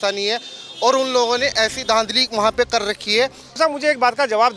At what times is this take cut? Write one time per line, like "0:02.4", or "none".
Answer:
0:03.5

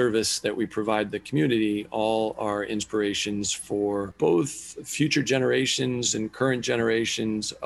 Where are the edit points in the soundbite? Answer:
0:04.1

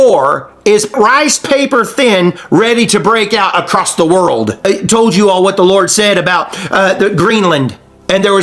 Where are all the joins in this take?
0:01.0
0:04.6

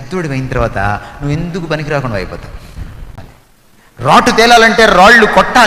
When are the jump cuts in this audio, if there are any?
0:03.2

